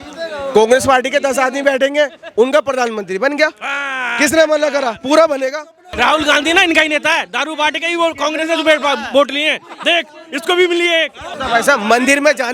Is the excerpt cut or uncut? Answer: cut